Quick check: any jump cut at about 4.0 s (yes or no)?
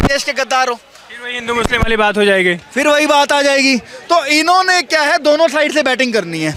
no